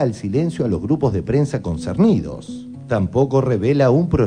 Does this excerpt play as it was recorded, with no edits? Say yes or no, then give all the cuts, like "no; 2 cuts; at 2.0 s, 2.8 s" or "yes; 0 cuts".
no; 1 cut; at 2.6 s